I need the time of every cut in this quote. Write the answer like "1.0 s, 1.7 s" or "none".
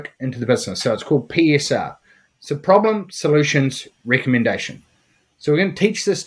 none